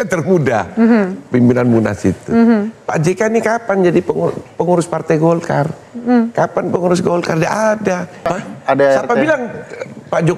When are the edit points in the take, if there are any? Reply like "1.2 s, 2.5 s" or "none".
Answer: 8.4 s